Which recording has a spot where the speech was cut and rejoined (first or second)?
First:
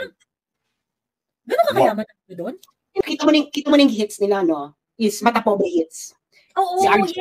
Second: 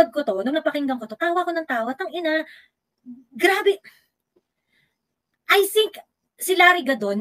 first